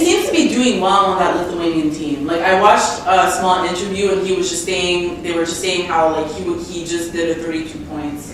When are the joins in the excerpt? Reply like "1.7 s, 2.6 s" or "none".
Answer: none